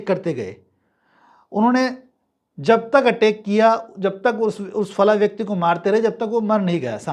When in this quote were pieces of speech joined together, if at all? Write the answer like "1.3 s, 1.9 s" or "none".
none